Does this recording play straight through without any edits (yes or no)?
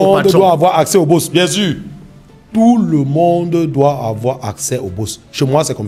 yes